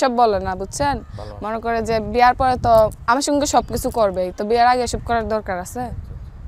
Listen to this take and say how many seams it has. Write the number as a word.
zero